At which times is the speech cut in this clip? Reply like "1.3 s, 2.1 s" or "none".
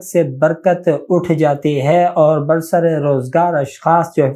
none